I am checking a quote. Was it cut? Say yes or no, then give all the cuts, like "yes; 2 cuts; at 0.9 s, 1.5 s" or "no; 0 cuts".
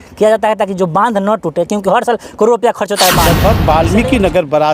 yes; 1 cut; at 3.3 s